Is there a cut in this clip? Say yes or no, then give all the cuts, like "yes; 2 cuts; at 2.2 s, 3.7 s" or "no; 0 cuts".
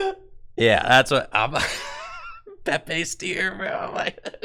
no; 0 cuts